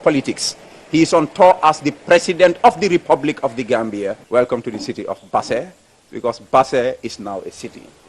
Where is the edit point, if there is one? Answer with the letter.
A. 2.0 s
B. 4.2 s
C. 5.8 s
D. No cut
B